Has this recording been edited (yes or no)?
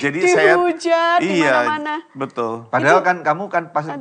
no